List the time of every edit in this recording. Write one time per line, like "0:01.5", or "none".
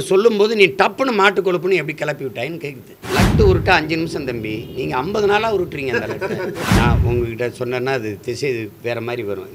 0:02.9
0:06.6